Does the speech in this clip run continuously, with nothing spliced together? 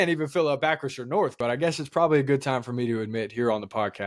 no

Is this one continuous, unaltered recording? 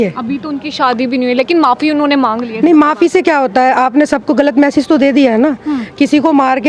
yes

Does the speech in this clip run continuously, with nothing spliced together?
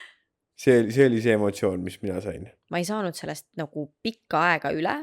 no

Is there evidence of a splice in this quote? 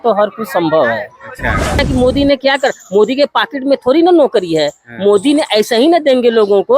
yes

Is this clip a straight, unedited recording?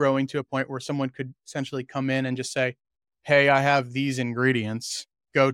yes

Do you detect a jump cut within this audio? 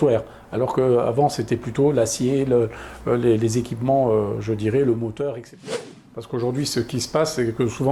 yes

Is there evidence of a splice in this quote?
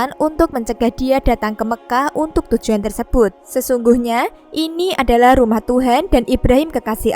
yes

